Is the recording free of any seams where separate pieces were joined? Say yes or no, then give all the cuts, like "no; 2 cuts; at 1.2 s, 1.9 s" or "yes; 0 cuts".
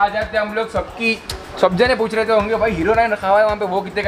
yes; 0 cuts